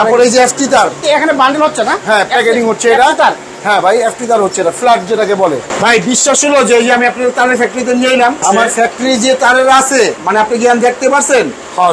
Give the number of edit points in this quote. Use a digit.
4